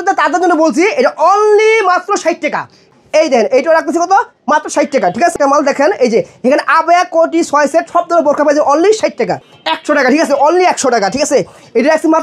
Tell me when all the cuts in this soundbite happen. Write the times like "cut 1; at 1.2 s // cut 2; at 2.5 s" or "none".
cut 1; at 2.9 s // cut 2; at 5.3 s // cut 3; at 9.4 s